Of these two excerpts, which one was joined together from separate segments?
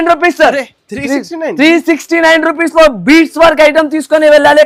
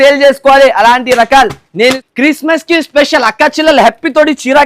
second; 1 cut; at 2.0 s

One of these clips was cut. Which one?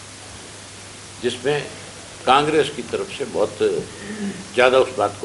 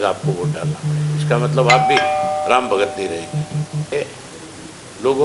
second; 1 cut; at 3.9 s

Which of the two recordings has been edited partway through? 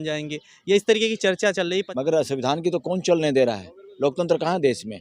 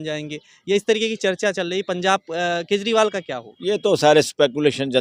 first; 1 cut; at 1.9 s

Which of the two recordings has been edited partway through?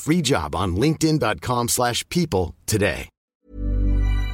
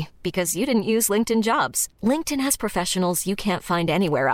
first; 1 cut; at 3.4 s

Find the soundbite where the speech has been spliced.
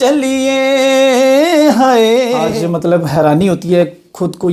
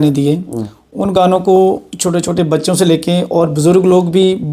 first; 1 cut; at 2.5 s

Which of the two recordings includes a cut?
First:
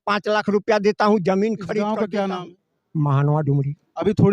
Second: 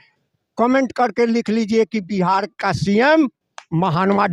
first; 1 cut; at 1.9 s

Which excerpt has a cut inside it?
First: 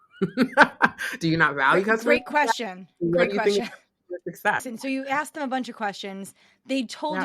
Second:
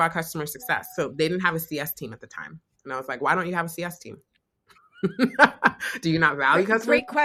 first; 1 cut; at 4.7 s

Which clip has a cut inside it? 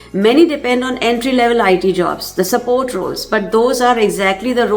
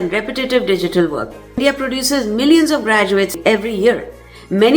second; 2 cuts; at 1.4 s, 3.4 s

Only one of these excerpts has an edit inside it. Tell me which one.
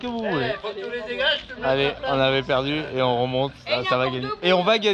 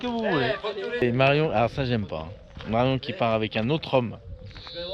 second; 1 cut; at 1.0 s

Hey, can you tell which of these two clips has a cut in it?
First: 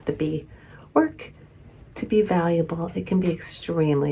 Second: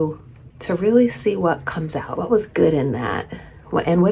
second; 1 cut; at 2.1 s

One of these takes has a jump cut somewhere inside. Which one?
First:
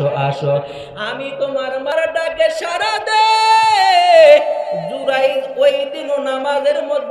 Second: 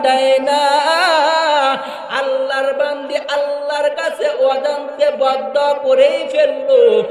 first; 1 cut; at 1.9 s

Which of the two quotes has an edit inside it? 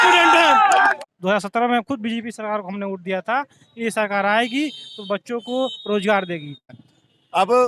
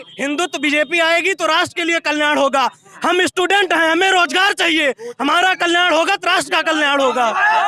first; 2 cuts; at 1.0 s, 6.7 s

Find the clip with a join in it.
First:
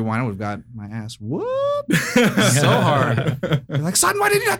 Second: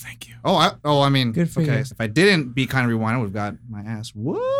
second; 1 cut; at 1.9 s

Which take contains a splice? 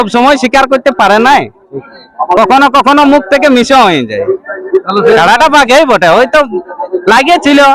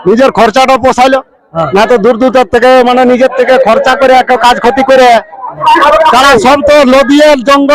second; 1 cut; at 5.5 s

